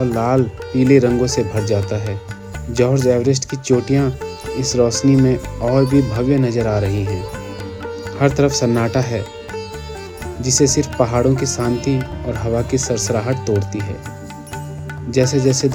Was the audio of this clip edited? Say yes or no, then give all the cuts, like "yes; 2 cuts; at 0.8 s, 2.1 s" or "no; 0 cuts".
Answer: no; 0 cuts